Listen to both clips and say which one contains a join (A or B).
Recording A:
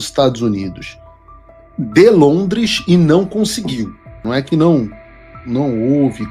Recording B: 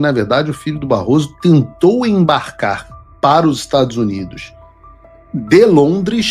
A